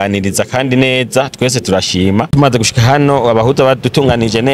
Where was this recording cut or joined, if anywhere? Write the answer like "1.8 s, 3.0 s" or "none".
2.3 s